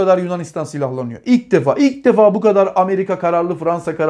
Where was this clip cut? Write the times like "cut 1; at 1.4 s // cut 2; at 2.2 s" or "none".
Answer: none